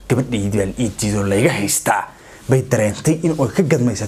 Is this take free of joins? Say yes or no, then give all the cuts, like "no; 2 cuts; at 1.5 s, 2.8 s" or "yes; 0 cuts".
yes; 0 cuts